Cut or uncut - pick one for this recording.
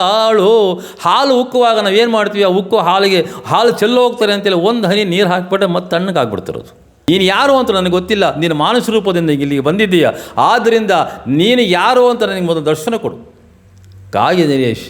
cut